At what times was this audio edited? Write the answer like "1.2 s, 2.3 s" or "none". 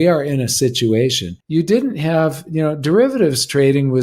1.3 s